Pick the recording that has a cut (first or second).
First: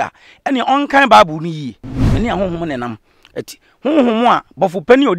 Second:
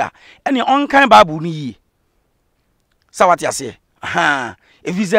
first